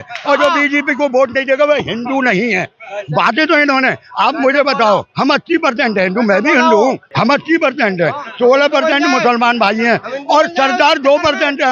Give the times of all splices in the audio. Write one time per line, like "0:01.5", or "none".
0:07.1